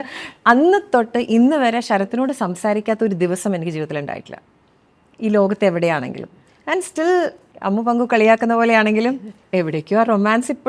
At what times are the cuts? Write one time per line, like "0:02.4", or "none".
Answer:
none